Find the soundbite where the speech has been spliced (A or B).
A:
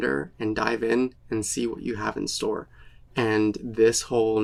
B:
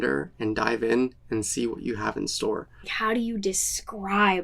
B